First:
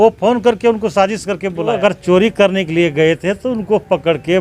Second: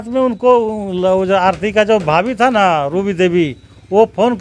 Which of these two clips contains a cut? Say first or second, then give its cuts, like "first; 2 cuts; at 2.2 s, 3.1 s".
first; 1 cut; at 1.8 s